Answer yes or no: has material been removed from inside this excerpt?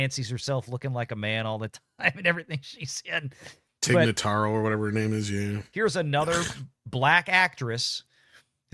yes